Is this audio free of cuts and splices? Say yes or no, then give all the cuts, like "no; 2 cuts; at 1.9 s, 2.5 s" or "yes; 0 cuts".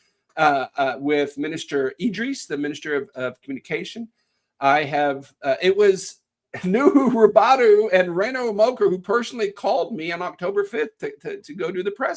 yes; 0 cuts